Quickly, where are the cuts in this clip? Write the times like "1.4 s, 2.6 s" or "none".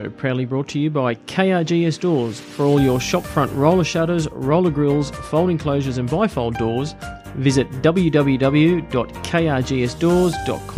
none